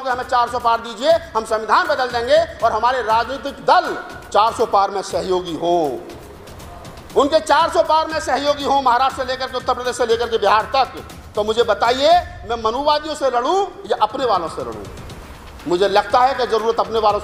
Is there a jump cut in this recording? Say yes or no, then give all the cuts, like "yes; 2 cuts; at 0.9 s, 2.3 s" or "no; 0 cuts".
no; 0 cuts